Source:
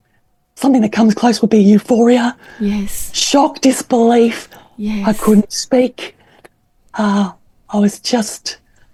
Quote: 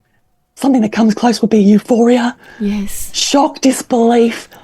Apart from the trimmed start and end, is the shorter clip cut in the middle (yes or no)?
no